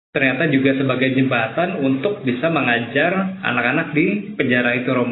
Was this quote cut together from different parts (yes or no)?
no